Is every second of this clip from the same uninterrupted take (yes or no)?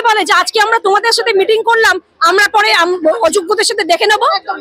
yes